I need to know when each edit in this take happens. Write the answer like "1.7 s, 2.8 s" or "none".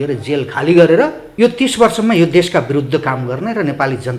1.2 s